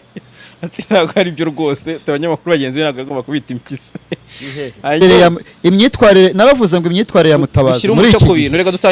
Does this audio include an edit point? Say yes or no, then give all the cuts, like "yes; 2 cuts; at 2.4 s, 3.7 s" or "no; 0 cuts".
yes; 1 cut; at 5.0 s